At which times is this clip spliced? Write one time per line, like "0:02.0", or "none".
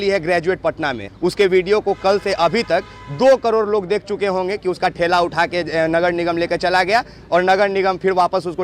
0:01.0